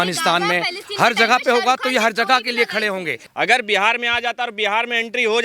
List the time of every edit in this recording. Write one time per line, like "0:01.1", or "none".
0:03.2